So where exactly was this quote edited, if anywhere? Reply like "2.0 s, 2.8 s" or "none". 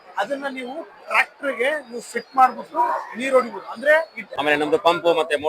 4.2 s